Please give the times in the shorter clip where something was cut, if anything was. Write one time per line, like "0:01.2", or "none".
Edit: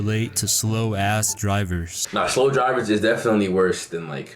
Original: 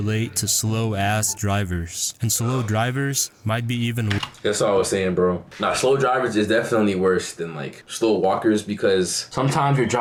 0:02.0